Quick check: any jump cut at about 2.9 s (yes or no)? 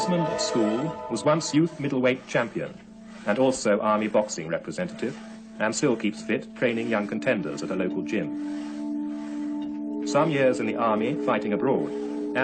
yes